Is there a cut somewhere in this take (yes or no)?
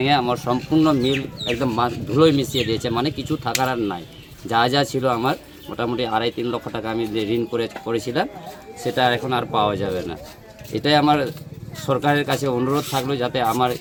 no